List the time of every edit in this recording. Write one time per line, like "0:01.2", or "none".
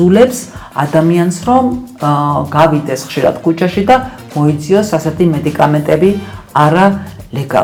none